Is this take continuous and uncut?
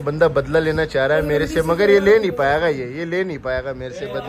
yes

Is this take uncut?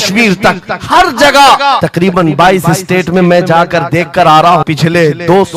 no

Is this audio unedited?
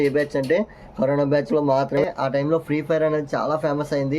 no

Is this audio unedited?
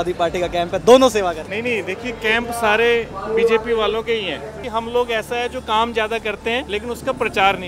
no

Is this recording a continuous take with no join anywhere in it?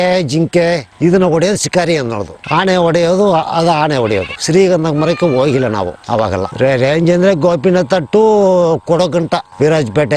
yes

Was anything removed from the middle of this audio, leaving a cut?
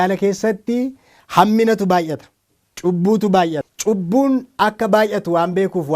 yes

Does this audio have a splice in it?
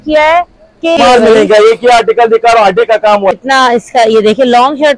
yes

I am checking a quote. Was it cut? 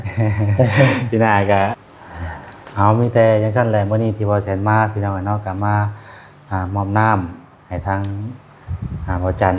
yes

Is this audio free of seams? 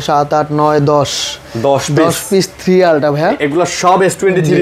yes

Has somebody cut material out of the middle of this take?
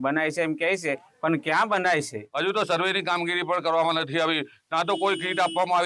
yes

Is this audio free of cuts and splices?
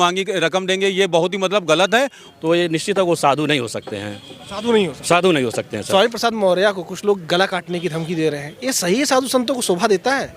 no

